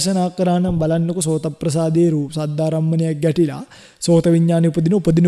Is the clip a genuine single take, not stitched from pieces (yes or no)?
yes